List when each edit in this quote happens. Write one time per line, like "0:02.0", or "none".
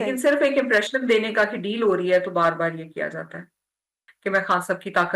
0:04.0